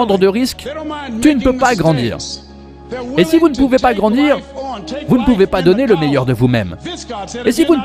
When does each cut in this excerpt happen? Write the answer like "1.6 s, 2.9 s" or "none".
none